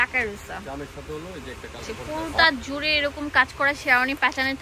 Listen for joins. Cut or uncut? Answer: cut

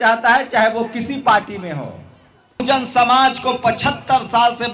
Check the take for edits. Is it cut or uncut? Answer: cut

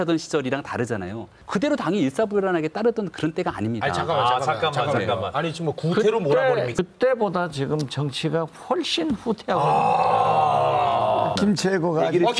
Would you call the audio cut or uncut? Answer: cut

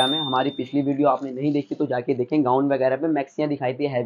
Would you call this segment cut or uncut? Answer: uncut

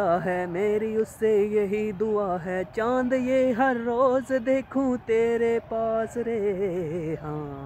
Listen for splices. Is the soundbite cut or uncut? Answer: uncut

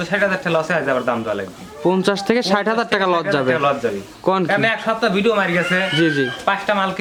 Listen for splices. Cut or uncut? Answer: uncut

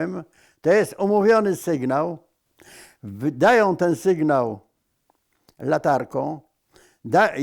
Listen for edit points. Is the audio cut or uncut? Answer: uncut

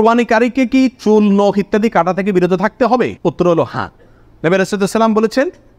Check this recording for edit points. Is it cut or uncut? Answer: uncut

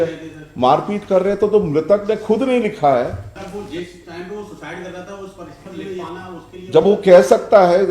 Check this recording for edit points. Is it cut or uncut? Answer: cut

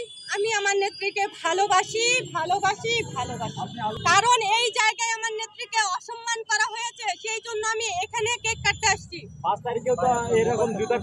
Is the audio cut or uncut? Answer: uncut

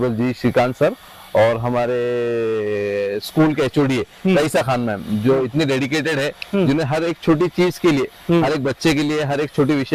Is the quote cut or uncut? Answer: uncut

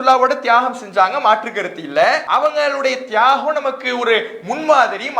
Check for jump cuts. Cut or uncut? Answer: cut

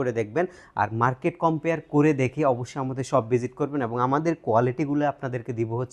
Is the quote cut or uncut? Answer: uncut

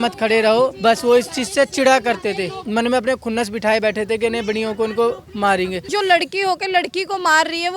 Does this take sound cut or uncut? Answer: cut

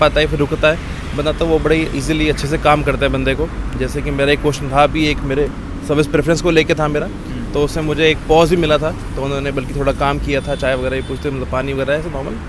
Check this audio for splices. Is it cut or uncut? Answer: uncut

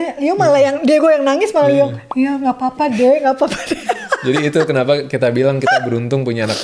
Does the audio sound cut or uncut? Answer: uncut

